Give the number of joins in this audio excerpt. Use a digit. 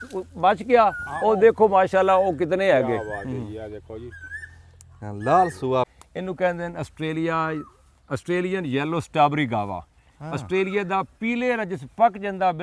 1